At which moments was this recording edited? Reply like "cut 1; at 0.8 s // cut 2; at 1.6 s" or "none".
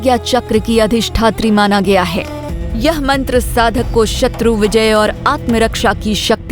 cut 1; at 2.4 s